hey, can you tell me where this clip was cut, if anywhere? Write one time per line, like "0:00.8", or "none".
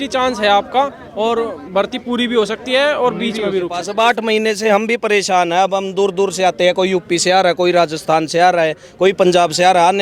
0:03.8